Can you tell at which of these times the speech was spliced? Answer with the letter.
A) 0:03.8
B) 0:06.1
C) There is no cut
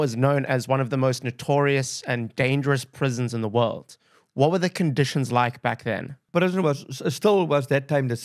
B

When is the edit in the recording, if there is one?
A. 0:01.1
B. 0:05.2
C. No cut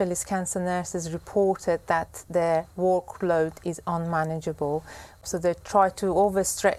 B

